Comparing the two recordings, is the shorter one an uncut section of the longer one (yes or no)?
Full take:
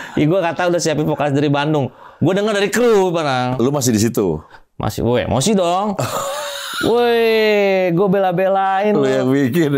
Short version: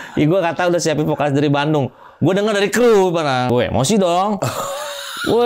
no